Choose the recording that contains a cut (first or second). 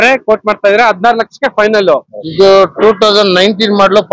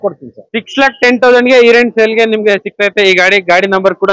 first